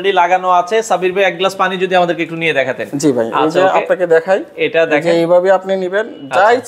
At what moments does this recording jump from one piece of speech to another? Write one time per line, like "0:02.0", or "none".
none